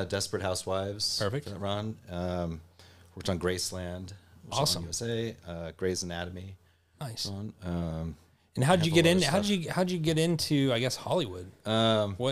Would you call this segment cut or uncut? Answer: uncut